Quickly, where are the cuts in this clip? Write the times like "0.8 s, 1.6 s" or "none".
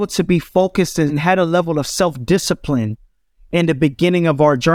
1.2 s